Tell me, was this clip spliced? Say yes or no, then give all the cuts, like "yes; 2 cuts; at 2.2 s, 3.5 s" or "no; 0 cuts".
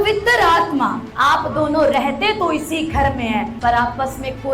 yes; 2 cuts; at 1.1 s, 3.5 s